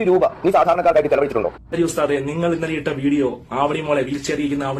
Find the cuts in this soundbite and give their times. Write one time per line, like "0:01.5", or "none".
0:01.6